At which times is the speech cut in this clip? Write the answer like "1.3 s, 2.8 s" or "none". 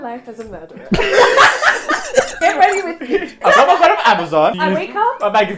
2.3 s, 3.4 s, 4.5 s